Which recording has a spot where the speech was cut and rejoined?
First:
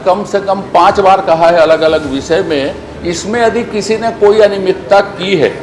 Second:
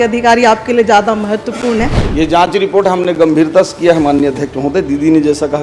second; 1 cut; at 2.0 s

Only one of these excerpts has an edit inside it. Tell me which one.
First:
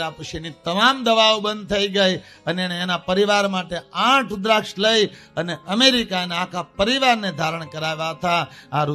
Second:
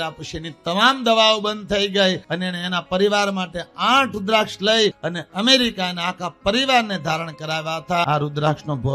second; 3 cuts; at 2.3 s, 5.0 s, 8.0 s

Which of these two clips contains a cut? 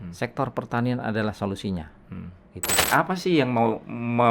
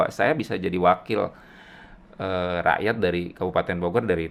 first; 1 cut; at 2.8 s

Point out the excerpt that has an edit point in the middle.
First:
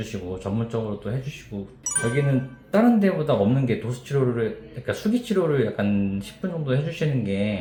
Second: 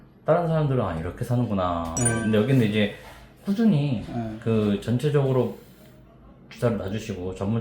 second; 1 cut; at 1.9 s

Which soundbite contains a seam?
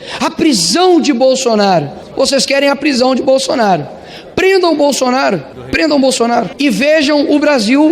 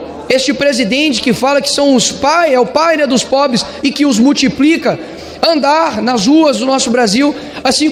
first; 3 cuts; at 2.0 s, 5.6 s, 6.5 s

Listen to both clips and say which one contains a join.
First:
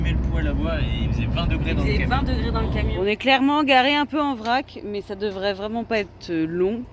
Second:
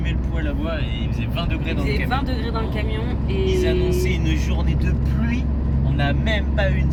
first; 1 cut; at 2.9 s

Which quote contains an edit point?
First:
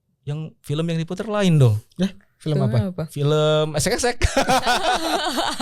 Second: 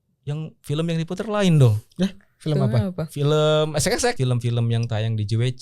second; 1 cut; at 4.2 s

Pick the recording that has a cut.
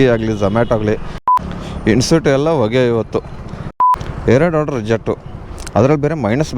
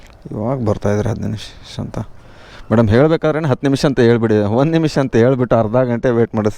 first; 2 cuts; at 1.1 s, 3.7 s

